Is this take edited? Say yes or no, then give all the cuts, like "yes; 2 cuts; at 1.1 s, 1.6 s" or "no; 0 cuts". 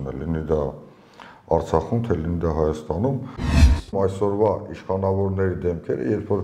yes; 1 cut; at 3.6 s